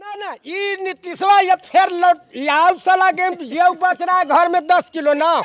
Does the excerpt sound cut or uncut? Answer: uncut